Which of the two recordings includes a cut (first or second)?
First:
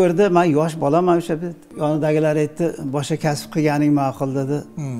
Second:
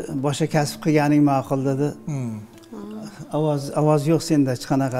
first